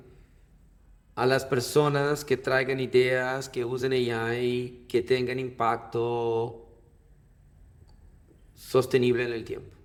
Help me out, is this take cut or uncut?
uncut